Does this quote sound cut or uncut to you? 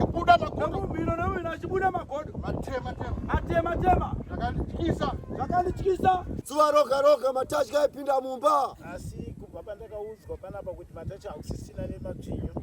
cut